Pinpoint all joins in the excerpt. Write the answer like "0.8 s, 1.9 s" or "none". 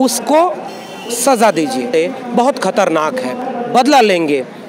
1.9 s, 3.4 s